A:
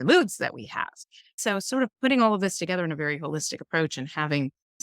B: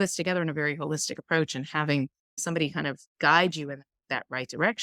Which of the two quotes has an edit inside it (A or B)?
A